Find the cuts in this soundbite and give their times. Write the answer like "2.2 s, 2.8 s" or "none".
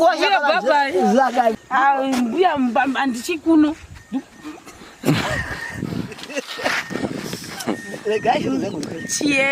1.5 s